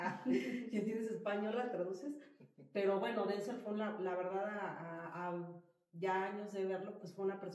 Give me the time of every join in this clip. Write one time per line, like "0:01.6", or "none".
none